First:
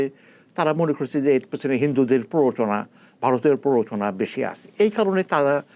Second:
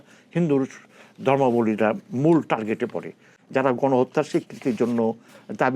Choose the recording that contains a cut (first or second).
second